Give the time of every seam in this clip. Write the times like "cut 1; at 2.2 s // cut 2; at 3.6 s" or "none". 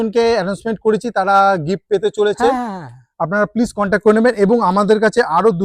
none